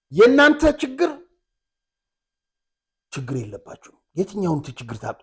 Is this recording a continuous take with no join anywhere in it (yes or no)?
yes